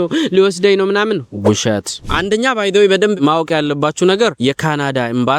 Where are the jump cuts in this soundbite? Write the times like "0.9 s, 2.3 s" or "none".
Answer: 1.9 s